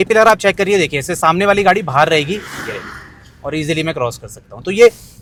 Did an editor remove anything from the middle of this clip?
no; 0 cuts

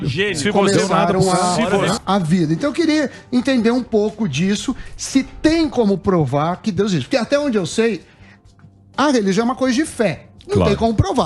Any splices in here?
yes; 1 cut; at 2.0 s

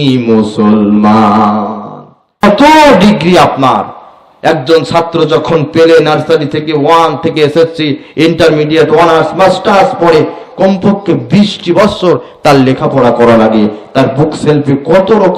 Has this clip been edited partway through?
yes; 1 cut; at 2.4 s

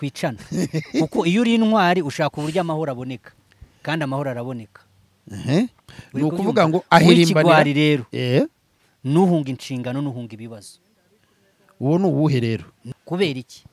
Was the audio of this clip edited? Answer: yes; 1 cut; at 12.8 s

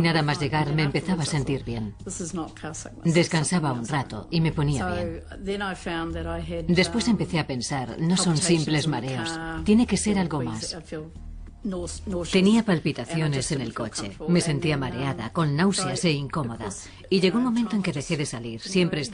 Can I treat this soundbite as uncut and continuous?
no; 1 cut; at 4.9 s

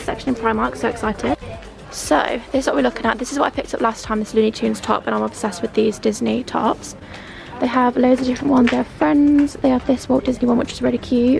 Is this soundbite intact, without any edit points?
yes; 0 cuts

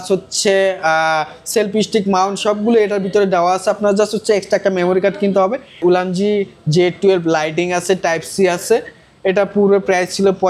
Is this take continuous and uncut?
no; 1 cut; at 5.8 s

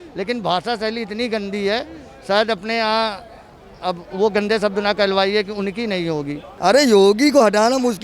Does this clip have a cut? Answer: yes; 1 cut; at 6.4 s

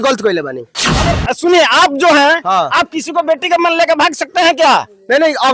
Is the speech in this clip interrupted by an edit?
yes; 1 cut; at 1.2 s

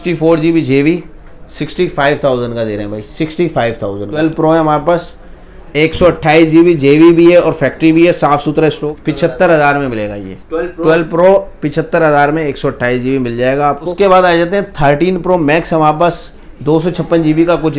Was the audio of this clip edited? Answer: yes; 3 cuts; at 4.1 s, 8.8 s, 13.9 s

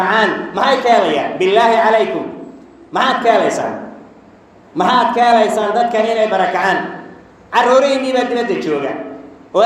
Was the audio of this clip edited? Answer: no; 0 cuts

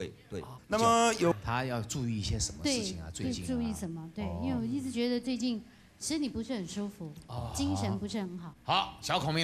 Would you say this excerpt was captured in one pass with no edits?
no; 1 cut; at 1.4 s

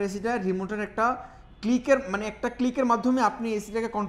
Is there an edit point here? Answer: no; 0 cuts

